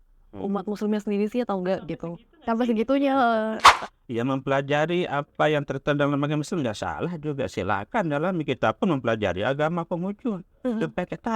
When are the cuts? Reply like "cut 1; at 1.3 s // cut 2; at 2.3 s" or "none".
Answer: cut 1; at 3.8 s